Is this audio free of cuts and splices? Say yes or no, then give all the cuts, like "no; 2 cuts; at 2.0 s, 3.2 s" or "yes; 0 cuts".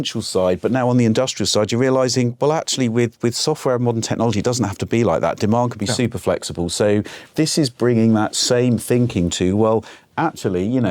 no; 1 cut; at 7.2 s